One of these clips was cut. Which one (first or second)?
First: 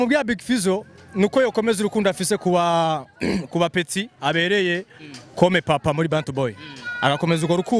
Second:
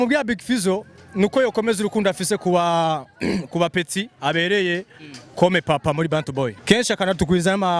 second